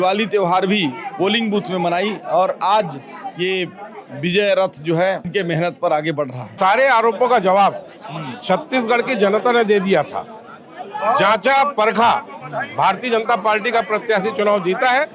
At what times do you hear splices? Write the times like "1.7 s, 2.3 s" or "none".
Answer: 5.3 s, 6.5 s